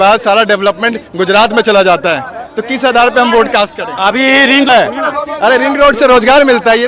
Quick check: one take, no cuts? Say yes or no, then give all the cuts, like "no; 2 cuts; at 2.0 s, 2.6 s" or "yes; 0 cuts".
no; 1 cut; at 4.7 s